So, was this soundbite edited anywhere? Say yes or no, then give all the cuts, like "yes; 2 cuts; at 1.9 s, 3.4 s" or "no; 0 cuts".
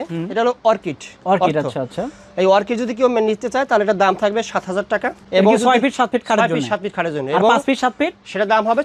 no; 0 cuts